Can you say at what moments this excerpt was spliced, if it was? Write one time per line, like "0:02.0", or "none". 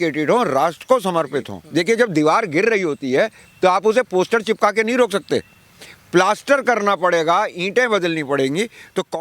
0:01.6